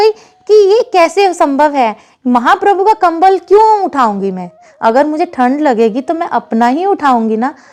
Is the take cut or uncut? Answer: uncut